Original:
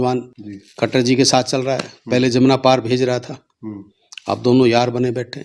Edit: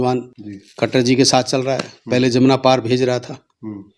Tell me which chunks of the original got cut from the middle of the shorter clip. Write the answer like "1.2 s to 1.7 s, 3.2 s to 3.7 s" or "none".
none